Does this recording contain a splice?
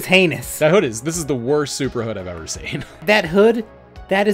yes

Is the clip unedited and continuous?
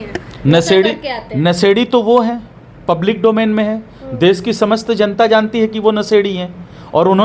yes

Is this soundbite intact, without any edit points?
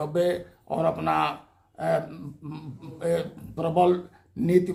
yes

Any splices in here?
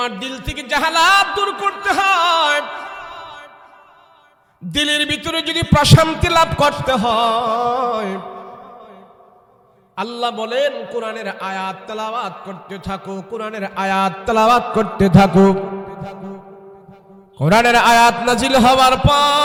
no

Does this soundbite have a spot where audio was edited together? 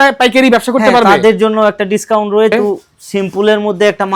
yes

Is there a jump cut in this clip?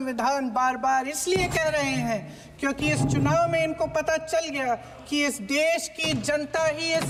no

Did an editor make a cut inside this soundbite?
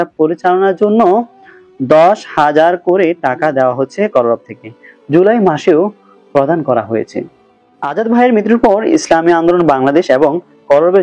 yes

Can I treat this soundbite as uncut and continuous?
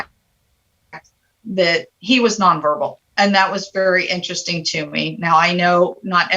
no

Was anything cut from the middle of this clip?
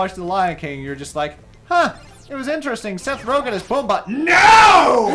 no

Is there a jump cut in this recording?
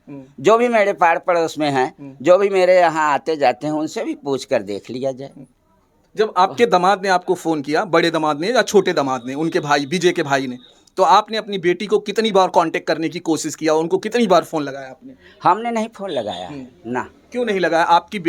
no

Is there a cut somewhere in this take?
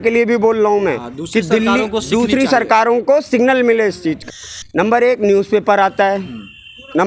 yes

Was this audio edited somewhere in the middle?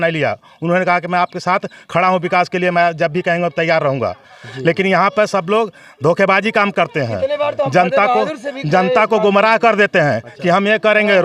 no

